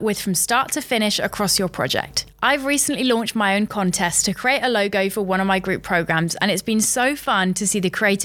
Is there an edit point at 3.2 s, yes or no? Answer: no